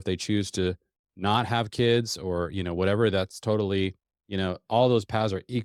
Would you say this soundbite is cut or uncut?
uncut